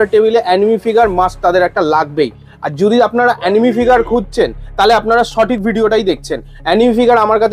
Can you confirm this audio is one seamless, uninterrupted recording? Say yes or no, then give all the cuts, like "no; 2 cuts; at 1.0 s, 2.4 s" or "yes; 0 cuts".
yes; 0 cuts